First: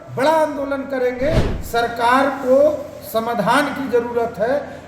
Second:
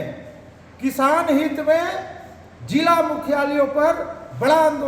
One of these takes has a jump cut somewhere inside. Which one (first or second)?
first